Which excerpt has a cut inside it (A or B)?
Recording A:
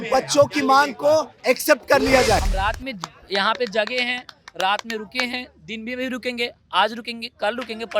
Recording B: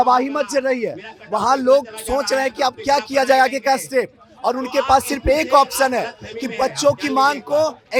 A